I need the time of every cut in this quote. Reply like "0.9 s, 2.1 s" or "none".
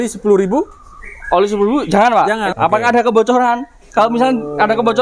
2.5 s